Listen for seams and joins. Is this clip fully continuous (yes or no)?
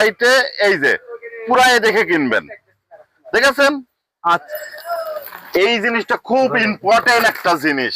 no